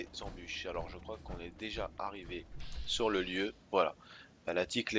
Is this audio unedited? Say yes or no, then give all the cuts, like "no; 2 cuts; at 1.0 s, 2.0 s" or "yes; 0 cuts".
yes; 0 cuts